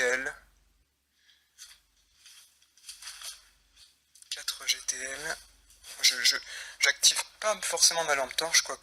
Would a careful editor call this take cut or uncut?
uncut